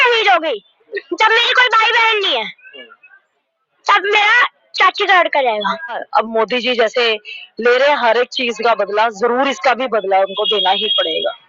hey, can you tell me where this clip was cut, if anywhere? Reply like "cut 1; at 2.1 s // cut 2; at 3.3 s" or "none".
cut 1; at 0.9 s // cut 2; at 6.0 s